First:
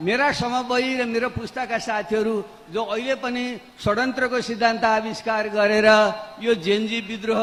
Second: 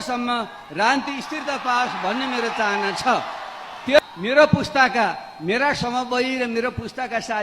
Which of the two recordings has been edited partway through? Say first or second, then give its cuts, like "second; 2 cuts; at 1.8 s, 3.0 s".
second; 1 cut; at 4.0 s